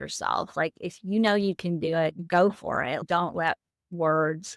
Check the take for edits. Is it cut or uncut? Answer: cut